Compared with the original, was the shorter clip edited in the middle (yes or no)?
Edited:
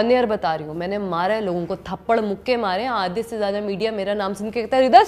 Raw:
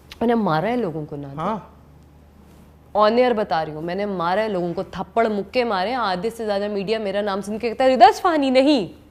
no